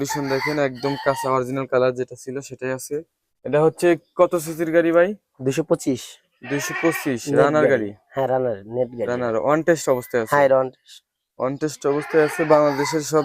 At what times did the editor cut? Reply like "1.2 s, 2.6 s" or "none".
3.2 s